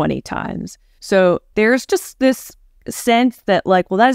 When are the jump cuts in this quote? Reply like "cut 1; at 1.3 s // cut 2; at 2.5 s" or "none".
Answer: cut 1; at 1.5 s